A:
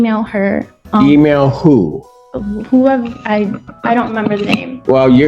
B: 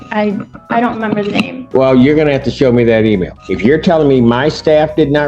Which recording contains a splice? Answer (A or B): B